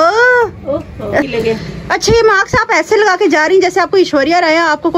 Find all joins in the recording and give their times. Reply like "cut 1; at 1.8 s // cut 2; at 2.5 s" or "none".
cut 1; at 1.3 s